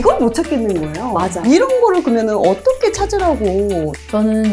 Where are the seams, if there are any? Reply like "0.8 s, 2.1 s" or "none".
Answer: none

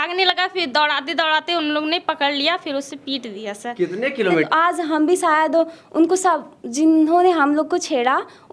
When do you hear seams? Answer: 4.5 s

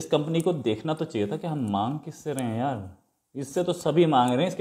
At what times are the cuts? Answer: none

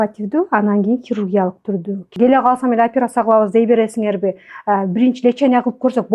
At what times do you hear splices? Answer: 2.1 s

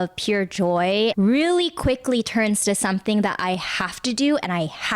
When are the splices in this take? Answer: 1.1 s

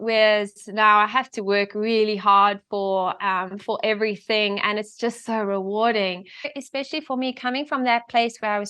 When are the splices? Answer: 6.5 s

